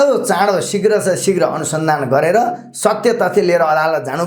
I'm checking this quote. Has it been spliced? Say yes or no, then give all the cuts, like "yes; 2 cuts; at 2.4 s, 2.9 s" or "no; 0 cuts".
no; 0 cuts